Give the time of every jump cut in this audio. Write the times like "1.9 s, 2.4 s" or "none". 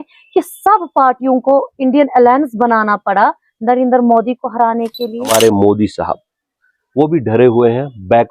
5.3 s